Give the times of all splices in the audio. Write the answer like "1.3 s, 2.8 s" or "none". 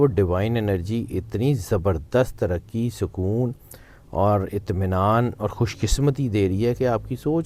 none